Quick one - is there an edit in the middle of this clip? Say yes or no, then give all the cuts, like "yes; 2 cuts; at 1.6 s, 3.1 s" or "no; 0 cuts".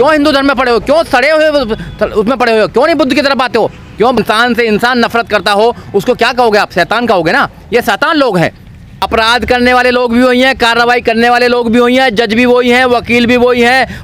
yes; 2 cuts; at 4.2 s, 8.9 s